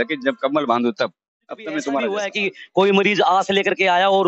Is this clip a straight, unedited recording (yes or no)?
no